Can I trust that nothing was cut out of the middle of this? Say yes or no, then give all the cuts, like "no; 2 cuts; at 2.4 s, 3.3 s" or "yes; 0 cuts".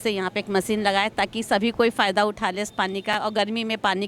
yes; 0 cuts